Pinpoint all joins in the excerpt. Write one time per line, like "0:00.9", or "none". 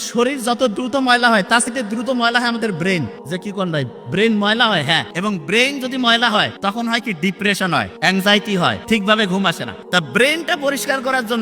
0:01.7
0:03.2
0:05.1
0:06.5
0:07.9
0:08.8
0:09.7

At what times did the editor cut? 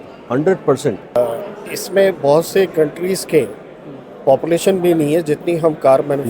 0:01.2

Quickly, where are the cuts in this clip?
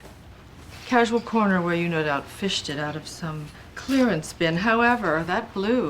0:04.4

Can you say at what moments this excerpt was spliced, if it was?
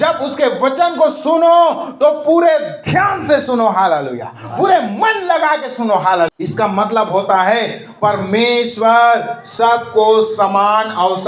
0:06.3

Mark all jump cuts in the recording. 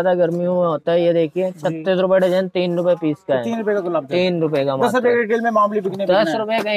none

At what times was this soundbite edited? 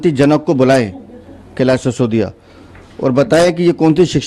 none

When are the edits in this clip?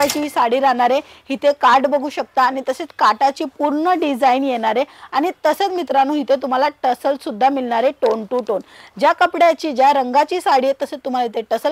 none

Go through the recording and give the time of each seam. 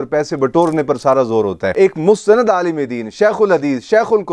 0:01.7

